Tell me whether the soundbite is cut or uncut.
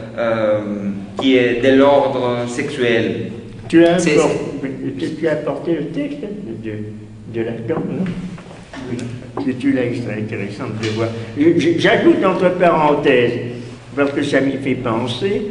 cut